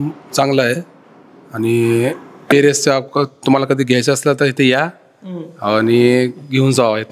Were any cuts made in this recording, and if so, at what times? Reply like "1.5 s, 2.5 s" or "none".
none